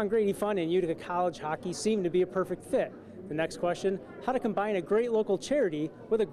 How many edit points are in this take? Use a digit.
0